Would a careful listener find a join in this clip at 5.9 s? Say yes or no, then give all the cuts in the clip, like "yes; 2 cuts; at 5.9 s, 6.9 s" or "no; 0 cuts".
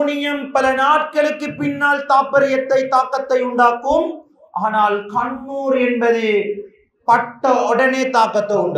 no; 0 cuts